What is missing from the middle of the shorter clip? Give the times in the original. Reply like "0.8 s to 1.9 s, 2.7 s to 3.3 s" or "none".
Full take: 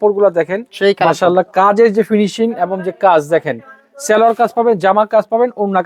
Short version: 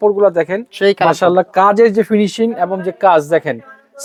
none